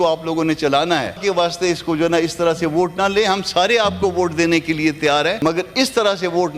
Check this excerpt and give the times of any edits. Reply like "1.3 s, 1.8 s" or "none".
1.2 s, 5.4 s